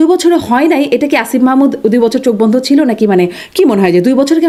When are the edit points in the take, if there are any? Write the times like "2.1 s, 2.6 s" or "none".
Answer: none